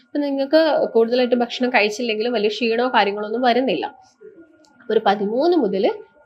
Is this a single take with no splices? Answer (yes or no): yes